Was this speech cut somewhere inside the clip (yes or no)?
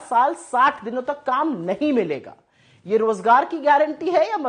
no